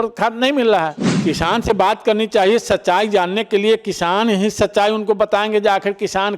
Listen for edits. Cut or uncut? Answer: cut